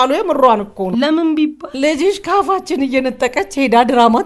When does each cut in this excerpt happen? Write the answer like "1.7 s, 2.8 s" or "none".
0.9 s, 1.6 s